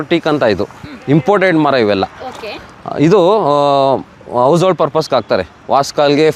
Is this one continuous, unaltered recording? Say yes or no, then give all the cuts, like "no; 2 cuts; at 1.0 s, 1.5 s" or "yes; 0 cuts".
yes; 0 cuts